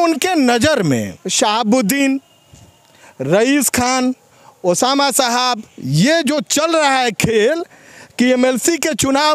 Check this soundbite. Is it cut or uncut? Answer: cut